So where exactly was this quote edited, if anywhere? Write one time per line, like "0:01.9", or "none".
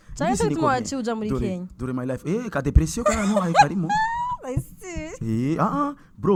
none

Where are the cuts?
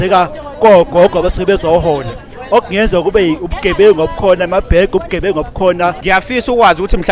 0:06.0

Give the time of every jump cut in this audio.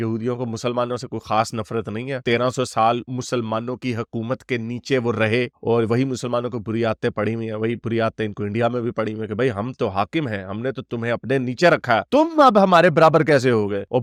none

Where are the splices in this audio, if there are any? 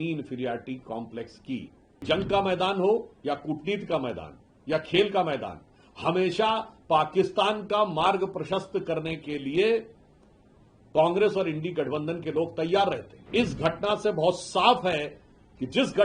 0:02.0
0:13.1

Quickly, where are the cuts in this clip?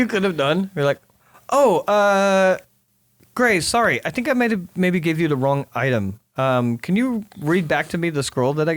none

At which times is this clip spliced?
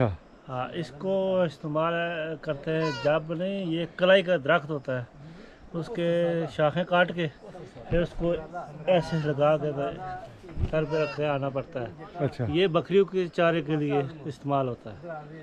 none

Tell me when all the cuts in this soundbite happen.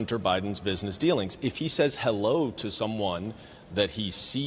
0:01.6

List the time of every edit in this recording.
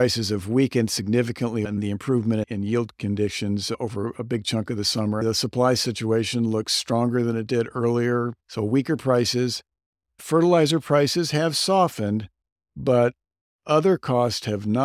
0:01.7
0:05.2
0:08.4

